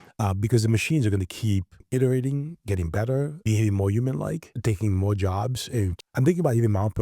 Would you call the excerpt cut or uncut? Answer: cut